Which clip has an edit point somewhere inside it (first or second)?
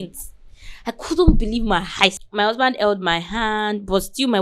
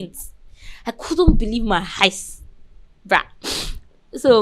first